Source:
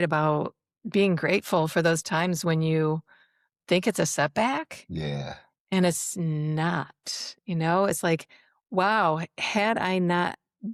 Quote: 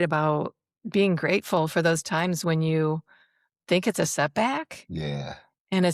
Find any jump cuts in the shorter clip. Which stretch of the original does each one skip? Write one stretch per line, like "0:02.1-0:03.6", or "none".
none